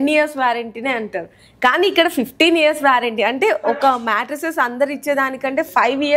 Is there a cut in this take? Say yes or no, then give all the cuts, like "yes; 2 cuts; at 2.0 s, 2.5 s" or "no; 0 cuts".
no; 0 cuts